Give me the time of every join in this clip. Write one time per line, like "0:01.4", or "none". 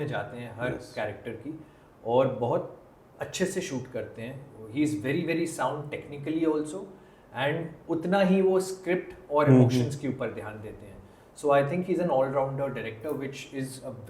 none